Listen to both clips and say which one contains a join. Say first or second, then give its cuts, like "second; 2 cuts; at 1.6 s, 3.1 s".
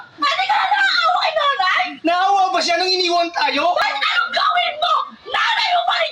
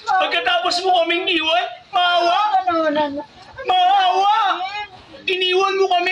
first; 1 cut; at 3.8 s